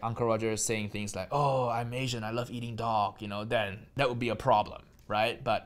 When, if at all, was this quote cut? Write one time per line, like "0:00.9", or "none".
0:03.9